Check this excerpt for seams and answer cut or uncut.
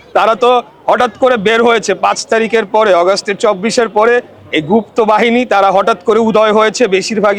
uncut